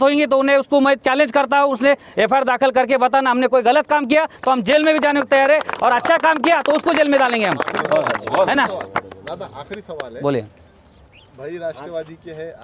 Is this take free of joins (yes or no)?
yes